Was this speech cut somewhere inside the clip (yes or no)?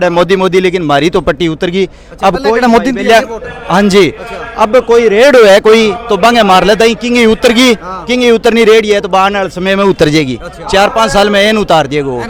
no